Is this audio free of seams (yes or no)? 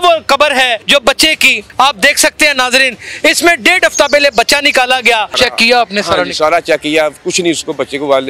no